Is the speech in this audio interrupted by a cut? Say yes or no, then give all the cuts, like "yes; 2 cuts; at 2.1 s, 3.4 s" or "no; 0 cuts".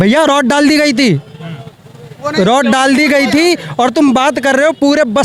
no; 0 cuts